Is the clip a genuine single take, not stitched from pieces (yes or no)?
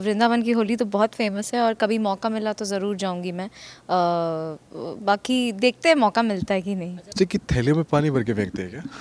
no